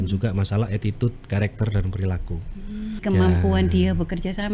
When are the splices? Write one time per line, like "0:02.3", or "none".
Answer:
0:03.0